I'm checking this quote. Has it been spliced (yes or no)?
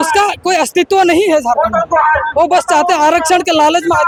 no